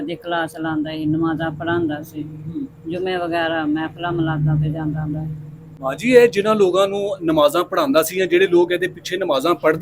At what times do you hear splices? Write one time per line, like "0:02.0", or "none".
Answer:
none